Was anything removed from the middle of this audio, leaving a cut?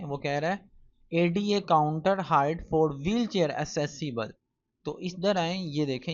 no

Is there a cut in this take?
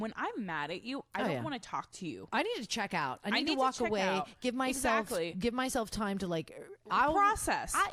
no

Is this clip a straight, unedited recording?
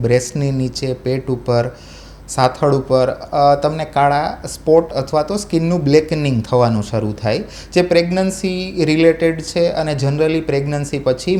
yes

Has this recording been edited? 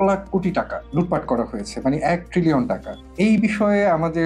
no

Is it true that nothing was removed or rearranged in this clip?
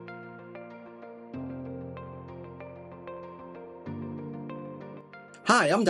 no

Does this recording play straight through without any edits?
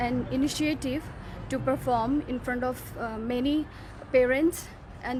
yes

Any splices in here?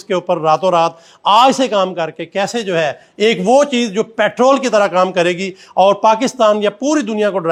no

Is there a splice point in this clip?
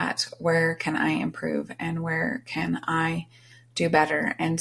no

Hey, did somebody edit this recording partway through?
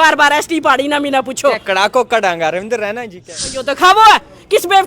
yes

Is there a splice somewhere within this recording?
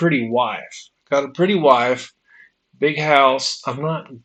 no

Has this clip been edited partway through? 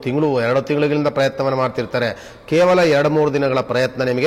no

